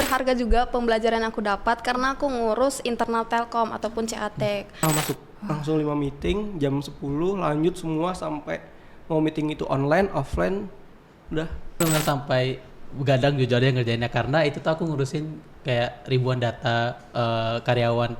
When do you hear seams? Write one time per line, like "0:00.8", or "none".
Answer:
0:04.8
0:11.8